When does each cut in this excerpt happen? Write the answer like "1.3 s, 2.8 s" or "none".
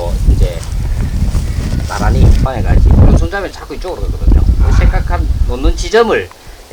2.5 s